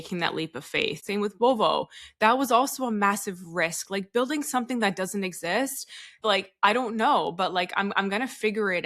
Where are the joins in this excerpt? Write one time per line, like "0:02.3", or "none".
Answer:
0:01.0
0:06.1